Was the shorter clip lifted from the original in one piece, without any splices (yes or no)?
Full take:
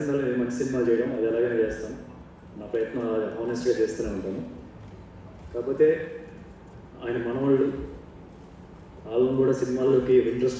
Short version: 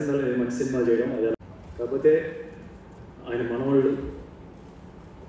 no